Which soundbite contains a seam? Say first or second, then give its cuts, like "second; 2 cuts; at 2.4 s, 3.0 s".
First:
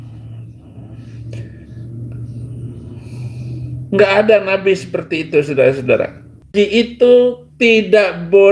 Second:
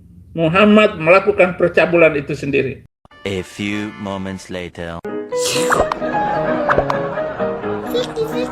second; 2 cuts; at 2.8 s, 4.9 s